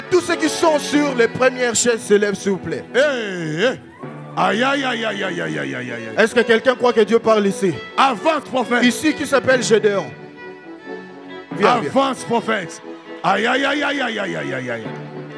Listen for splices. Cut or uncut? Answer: uncut